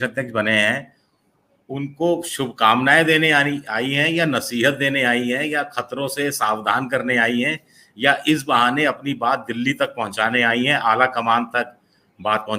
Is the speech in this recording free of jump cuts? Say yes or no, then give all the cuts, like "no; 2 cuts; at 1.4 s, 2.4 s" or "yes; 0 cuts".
yes; 0 cuts